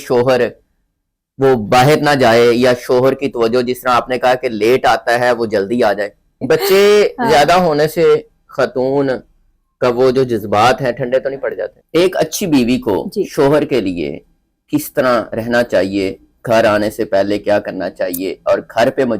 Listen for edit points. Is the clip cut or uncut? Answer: cut